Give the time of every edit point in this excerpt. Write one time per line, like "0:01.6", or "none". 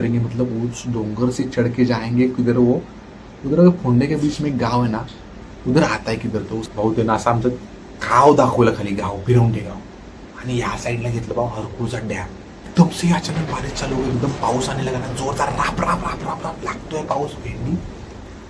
0:06.7
0:12.7